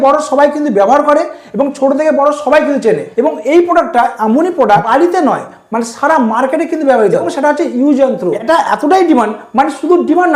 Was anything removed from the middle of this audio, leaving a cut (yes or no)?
yes